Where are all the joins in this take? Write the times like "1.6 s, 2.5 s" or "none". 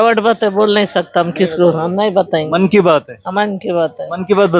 none